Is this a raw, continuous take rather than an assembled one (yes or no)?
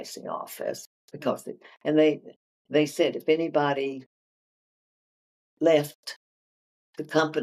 yes